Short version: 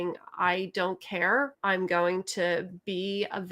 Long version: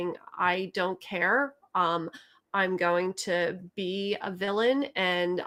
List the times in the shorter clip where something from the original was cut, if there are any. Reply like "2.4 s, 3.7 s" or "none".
1.5 s